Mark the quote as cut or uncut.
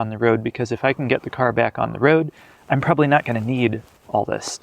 uncut